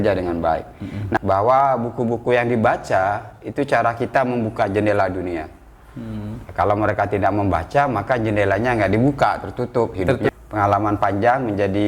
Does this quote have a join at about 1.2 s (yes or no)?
yes